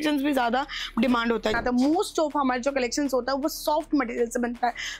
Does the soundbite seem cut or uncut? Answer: cut